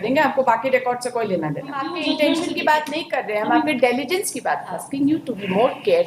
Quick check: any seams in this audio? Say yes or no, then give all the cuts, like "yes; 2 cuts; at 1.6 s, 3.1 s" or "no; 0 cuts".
yes; 2 cuts; at 1.9 s, 4.9 s